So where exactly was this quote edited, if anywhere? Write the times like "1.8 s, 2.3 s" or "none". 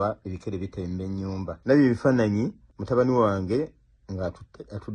1.6 s, 2.7 s